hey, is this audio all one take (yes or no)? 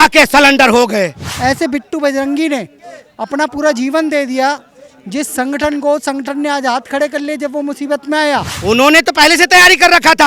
no